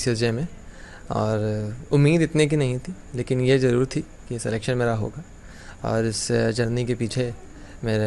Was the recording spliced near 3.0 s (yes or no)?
no